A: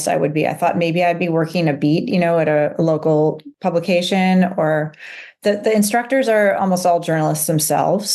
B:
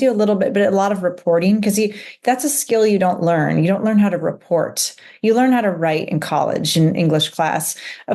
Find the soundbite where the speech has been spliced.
A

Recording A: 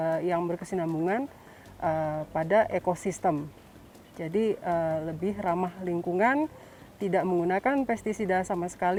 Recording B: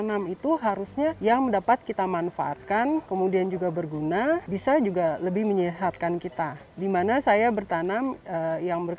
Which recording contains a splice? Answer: B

